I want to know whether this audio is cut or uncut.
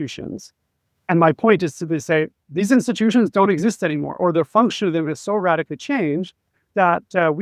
uncut